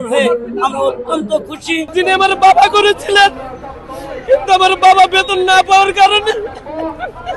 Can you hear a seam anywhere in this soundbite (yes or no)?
yes